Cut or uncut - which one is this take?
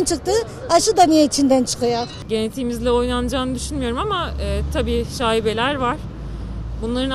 cut